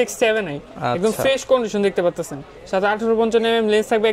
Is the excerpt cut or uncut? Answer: uncut